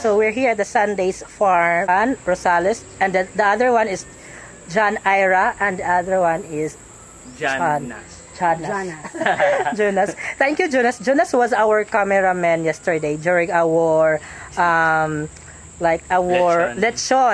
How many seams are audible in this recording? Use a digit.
1